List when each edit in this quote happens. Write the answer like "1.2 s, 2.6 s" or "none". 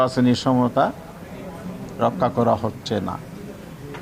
none